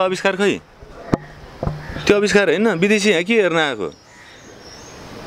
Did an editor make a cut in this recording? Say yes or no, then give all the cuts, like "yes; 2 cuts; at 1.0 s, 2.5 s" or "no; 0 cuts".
no; 0 cuts